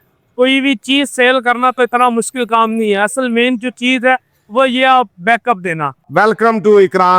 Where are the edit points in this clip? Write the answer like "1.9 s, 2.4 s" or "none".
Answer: 5.9 s